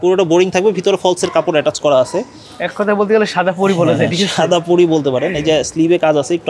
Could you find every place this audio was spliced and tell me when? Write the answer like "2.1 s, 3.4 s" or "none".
none